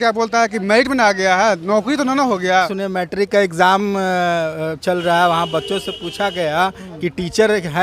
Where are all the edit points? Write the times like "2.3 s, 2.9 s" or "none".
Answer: 2.7 s